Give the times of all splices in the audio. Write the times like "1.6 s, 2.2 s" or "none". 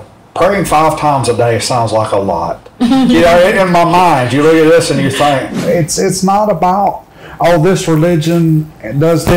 5.6 s

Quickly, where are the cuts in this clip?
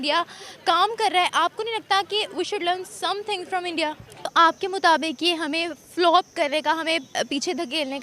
4.3 s

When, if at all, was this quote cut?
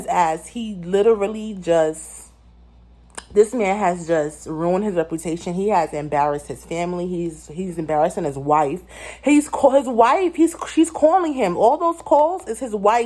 none

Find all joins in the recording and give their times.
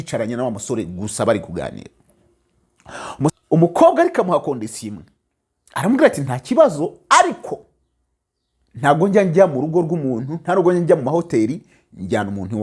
3.3 s

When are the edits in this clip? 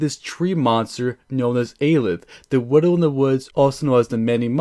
3.5 s

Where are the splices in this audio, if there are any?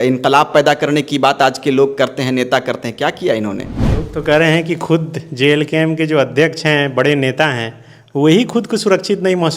3.8 s

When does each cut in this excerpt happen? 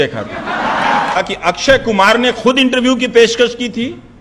1.2 s

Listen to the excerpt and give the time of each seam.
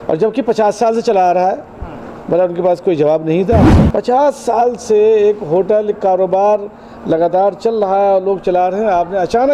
3.7 s

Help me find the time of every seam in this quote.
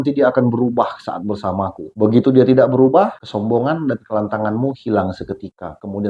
1.8 s, 3.2 s

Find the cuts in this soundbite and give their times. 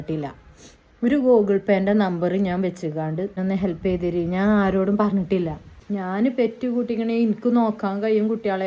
3.4 s, 5.7 s

